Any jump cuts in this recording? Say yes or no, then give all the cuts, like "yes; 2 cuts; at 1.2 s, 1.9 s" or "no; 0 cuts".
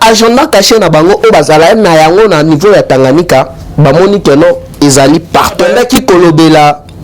yes; 1 cut; at 5.7 s